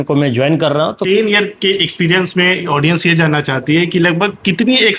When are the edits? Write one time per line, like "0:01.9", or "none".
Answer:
0:01.0